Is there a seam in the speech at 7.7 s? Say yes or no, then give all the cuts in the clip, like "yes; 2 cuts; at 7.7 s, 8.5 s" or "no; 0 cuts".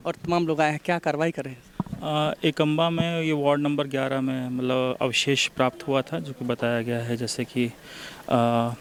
no; 0 cuts